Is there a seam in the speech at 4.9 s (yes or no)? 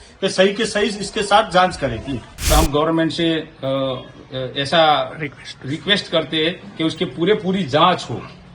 no